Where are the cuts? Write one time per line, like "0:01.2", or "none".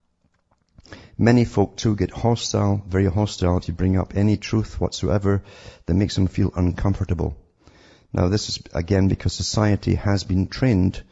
0:03.7